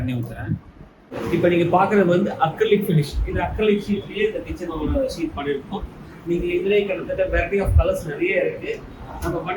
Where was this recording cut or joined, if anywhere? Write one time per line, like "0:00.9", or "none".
0:01.1